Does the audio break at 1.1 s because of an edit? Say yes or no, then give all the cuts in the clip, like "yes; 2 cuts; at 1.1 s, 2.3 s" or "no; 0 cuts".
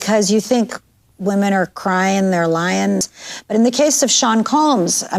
no; 1 cut; at 3.0 s